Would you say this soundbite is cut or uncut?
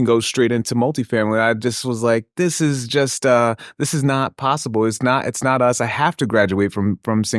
uncut